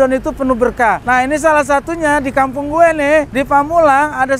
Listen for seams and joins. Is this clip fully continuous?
no; 2 cuts; at 1.0 s, 3.3 s

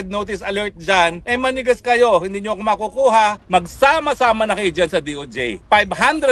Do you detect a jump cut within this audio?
yes; 2 cuts; at 1.2 s, 3.4 s

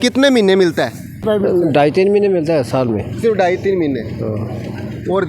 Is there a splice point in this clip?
yes; 1 cut; at 1.2 s

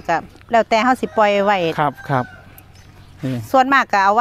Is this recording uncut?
yes; 0 cuts

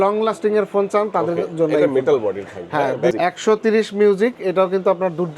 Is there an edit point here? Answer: yes; 1 cut; at 3.2 s

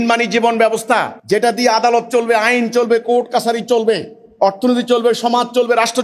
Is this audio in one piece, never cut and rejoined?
no; 1 cut; at 1.1 s

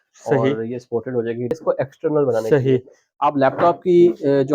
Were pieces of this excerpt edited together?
yes; 1 cut; at 1.5 s

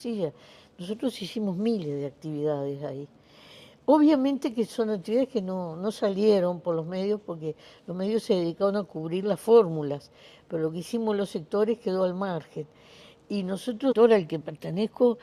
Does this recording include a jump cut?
no; 0 cuts

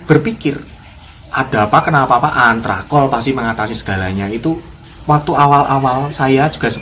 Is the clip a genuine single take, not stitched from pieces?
yes; 0 cuts

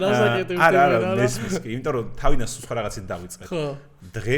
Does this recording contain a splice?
no; 0 cuts

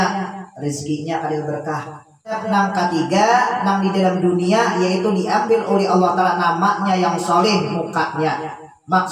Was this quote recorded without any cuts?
no; 1 cut; at 2.4 s

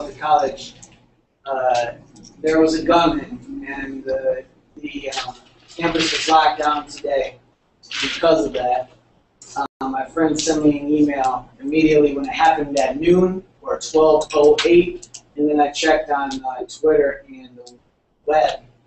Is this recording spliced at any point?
no; 0 cuts

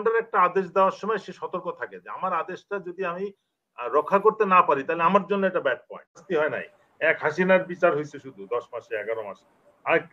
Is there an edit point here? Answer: yes; 1 cut; at 6.2 s

